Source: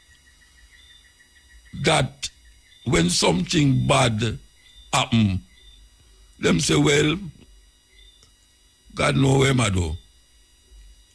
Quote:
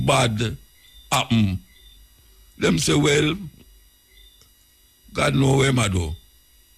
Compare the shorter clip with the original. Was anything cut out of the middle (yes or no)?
no